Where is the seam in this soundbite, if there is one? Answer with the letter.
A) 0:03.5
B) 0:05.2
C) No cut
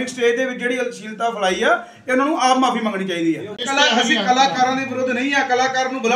C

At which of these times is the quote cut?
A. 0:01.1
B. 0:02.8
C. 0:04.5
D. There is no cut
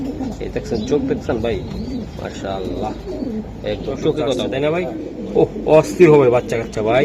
C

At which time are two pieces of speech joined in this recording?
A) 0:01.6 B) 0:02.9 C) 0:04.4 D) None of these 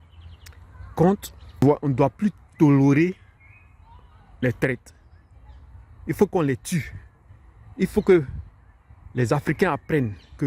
A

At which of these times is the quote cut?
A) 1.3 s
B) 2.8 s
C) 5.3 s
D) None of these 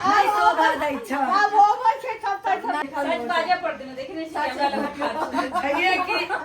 B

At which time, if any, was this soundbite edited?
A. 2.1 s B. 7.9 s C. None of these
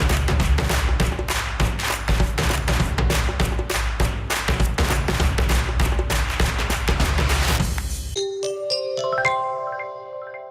B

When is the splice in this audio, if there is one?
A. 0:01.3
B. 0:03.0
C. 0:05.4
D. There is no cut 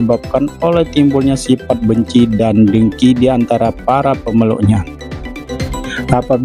C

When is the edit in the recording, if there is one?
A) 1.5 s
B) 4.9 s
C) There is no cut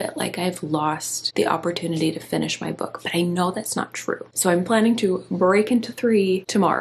C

